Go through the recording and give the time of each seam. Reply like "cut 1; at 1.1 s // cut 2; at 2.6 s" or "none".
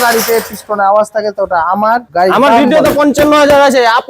cut 1; at 2.1 s

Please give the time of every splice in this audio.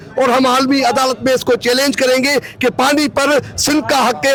none

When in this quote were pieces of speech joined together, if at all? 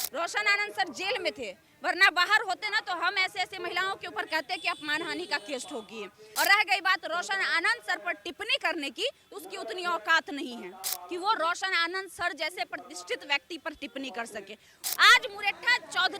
cut 1; at 6.2 s // cut 2; at 14.8 s

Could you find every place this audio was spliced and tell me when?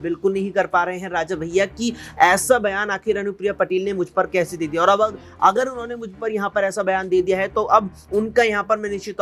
none

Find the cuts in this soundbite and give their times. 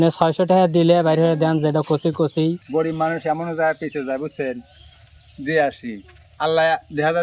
cut 1; at 2.6 s

